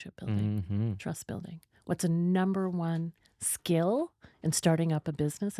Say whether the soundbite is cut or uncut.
uncut